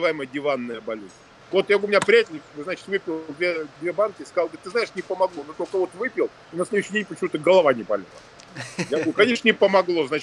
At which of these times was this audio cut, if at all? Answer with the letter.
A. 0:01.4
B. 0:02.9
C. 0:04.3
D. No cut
A